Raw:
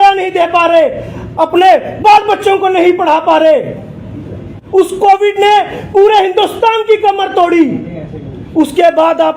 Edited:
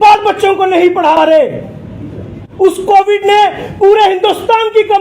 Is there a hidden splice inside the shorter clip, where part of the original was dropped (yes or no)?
yes